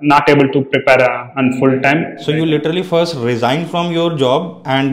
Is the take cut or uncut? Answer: cut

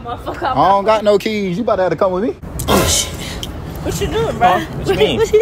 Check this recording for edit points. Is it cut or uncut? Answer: cut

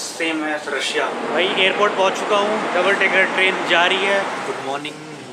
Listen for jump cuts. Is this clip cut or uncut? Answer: cut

